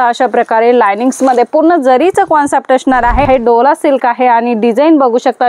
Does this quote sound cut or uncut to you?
cut